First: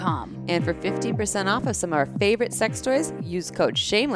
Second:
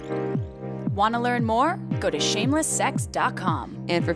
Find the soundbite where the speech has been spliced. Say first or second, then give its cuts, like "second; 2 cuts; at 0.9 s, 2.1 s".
second; 1 cut; at 0.9 s